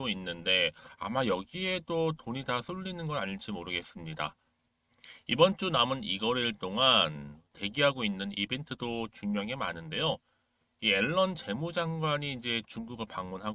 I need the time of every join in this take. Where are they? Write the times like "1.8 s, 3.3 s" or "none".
none